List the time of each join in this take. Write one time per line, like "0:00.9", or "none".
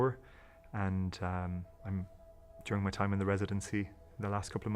0:01.9